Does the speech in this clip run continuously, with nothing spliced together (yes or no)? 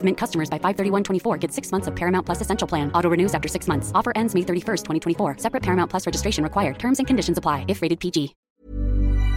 no